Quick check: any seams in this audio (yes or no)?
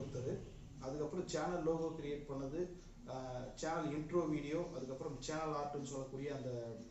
no